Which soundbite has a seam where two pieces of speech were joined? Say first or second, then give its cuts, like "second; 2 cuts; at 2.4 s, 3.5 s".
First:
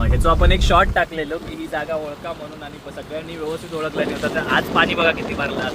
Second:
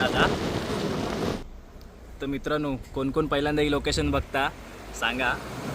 second; 1 cut; at 1.4 s